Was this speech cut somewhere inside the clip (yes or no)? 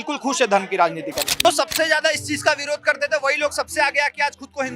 yes